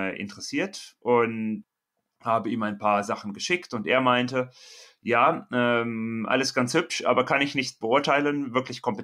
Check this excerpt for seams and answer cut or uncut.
cut